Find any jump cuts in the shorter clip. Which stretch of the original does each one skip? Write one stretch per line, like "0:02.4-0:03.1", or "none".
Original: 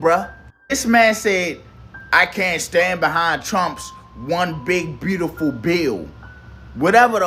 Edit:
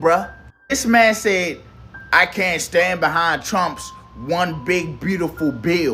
none